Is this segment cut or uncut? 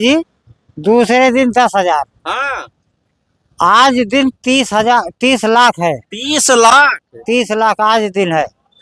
uncut